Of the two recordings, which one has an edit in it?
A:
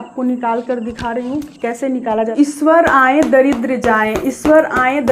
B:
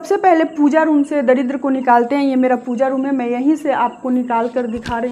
A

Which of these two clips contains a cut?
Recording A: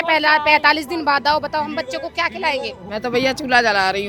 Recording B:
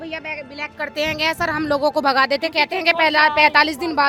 A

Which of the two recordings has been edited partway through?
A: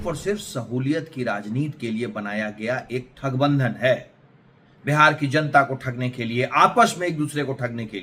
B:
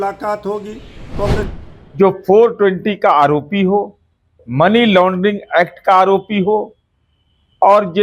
B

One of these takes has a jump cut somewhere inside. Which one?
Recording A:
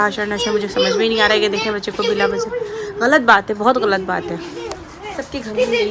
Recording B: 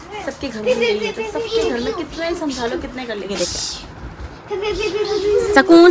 B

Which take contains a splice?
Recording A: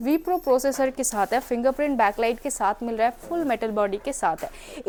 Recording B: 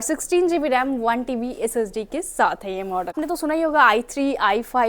B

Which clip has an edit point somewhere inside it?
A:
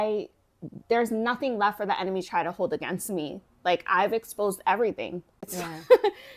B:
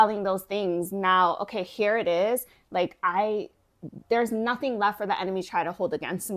A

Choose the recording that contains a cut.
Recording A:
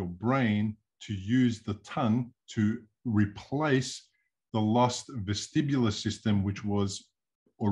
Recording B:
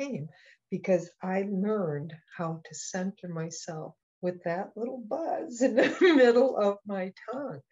B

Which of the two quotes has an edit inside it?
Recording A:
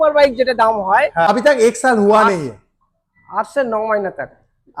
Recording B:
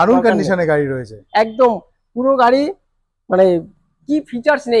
A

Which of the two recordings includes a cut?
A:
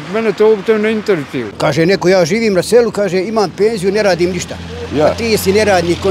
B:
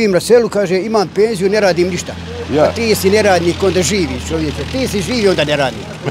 A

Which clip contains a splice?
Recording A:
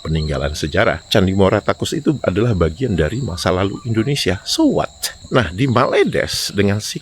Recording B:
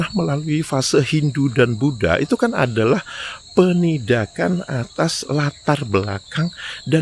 A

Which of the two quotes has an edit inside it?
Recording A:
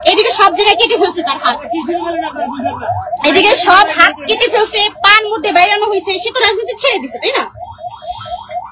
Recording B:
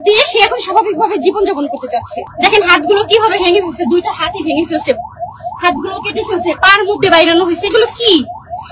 B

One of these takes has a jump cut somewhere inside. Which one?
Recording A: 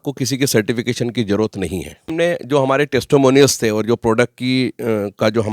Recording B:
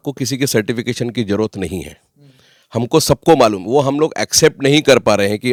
A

